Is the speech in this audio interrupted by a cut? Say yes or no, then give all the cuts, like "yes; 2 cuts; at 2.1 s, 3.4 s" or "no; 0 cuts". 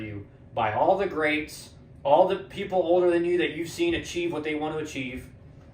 no; 0 cuts